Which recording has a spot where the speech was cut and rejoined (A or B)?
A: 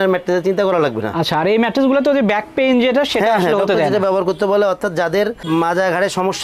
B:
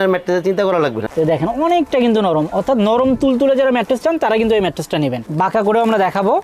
B